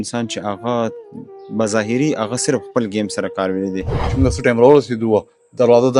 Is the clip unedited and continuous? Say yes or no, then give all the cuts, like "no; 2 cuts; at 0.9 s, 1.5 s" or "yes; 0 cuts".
no; 1 cut; at 4.2 s